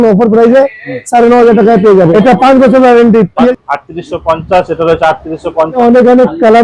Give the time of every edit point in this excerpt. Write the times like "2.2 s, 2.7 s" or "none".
2.1 s, 3.5 s, 5.8 s